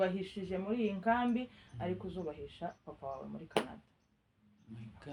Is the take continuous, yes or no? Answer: yes